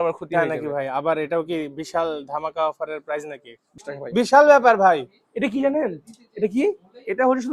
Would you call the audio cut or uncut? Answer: cut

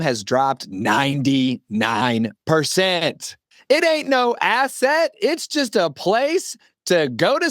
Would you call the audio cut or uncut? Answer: cut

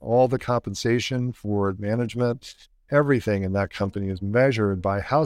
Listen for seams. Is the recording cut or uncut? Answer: uncut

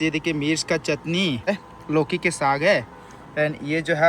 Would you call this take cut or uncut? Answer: cut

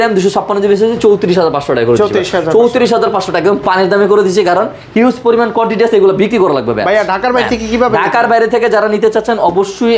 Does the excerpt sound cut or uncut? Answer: uncut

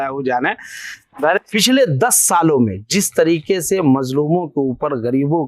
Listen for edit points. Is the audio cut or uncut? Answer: cut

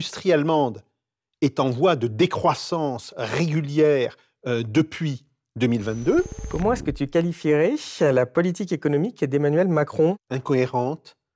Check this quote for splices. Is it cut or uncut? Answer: cut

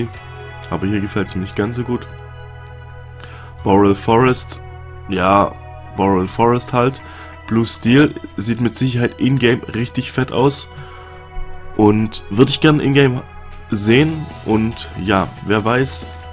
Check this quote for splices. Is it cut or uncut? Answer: uncut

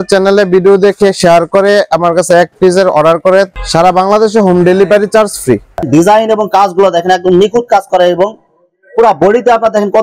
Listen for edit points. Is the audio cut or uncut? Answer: cut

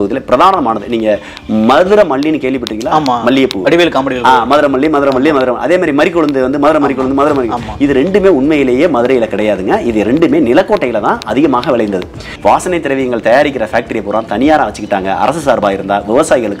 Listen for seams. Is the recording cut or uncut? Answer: cut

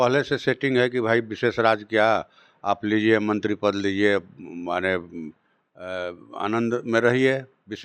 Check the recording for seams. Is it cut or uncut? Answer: uncut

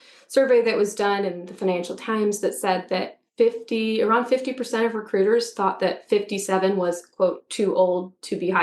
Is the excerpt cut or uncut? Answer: uncut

